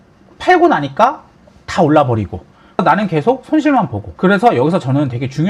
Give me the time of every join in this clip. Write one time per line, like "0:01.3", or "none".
0:02.8
0:04.0